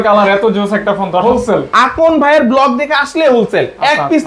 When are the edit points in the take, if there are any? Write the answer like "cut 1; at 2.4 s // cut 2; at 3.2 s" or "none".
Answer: cut 1; at 1.2 s